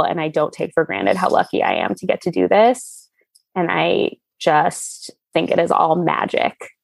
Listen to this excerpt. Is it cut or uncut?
uncut